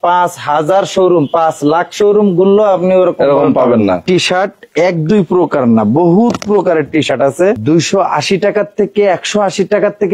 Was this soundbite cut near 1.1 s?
no; 2 cuts; at 4.0 s, 7.6 s

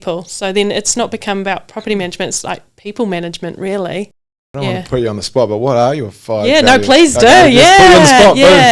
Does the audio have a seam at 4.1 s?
yes; 1 cut; at 4.1 s

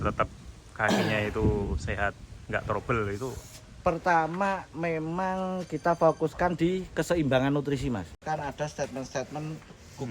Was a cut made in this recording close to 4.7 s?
no; 1 cut; at 8.2 s

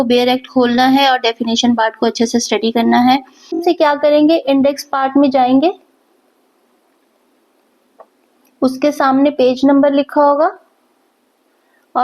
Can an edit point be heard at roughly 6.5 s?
no; 1 cut; at 3.6 s

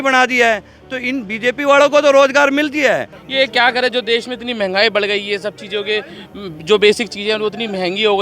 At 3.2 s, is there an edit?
yes; 1 cut; at 3.2 s

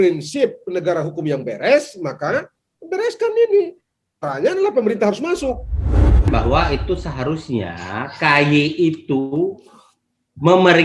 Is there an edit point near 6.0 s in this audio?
yes; 1 cut; at 6.0 s

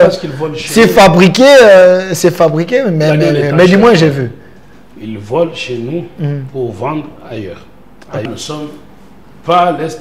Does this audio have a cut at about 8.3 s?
yes; 1 cut; at 8.3 s

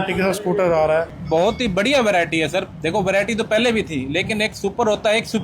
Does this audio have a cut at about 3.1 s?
no; 1 cut; at 1.2 s

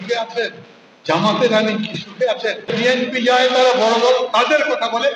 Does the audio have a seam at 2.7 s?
yes; 1 cut; at 2.7 s

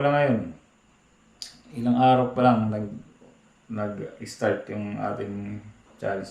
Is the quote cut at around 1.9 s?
no; 0 cuts

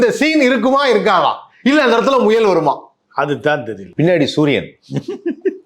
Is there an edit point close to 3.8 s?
yes; 1 cut; at 3.8 s

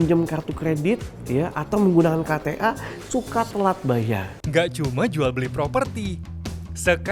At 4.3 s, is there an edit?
yes; 1 cut; at 4.3 s

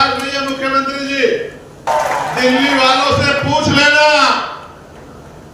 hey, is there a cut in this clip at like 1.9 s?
yes; 1 cut; at 1.9 s

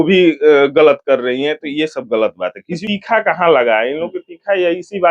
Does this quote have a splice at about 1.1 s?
no; 1 cut; at 2.8 s

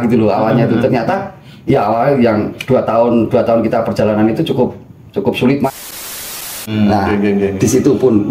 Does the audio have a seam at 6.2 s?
yes; 1 cut; at 6.2 s

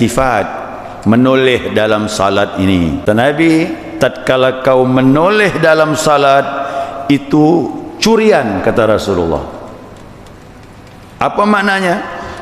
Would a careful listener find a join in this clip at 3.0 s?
yes; 1 cut; at 3.0 s

